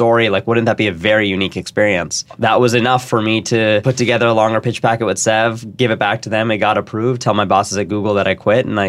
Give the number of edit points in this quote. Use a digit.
2